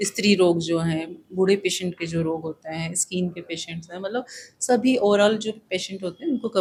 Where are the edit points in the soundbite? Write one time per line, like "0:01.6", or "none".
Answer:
none